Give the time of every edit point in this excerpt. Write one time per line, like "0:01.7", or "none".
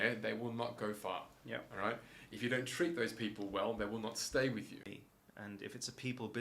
0:05.0